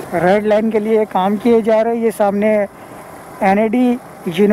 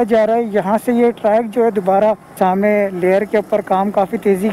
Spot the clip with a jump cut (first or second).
second